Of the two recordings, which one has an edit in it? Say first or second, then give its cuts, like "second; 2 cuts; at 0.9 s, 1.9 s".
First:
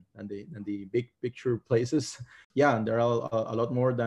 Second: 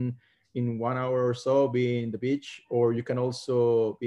first; 1 cut; at 2.4 s